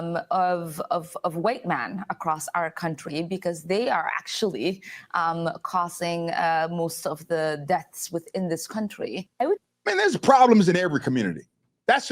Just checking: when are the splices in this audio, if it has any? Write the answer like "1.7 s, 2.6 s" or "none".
9.7 s

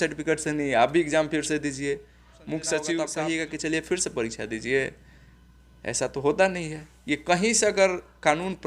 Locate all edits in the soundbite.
3.1 s

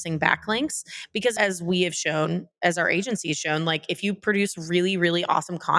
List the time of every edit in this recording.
none

